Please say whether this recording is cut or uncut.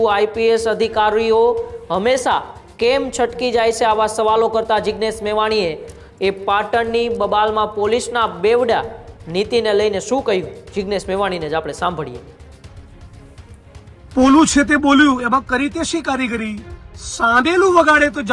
uncut